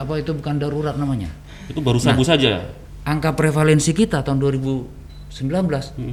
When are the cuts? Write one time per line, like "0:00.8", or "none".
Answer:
none